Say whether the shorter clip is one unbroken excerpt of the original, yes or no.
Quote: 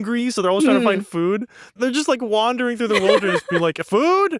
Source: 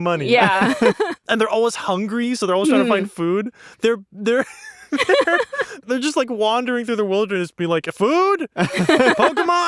no